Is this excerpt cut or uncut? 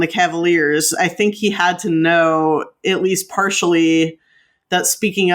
uncut